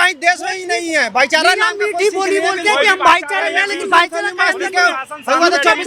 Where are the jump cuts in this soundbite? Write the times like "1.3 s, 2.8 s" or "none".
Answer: none